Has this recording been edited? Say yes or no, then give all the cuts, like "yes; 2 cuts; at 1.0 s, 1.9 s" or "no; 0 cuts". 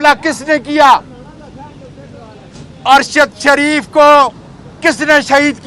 no; 0 cuts